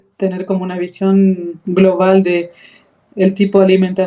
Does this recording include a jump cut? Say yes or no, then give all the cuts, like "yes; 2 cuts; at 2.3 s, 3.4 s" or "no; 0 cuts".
no; 0 cuts